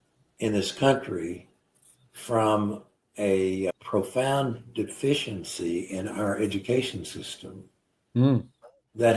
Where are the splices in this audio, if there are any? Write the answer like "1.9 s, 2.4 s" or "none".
3.7 s